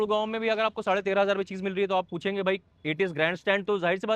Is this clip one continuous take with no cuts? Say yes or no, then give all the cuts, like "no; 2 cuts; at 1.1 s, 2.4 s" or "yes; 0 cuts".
yes; 0 cuts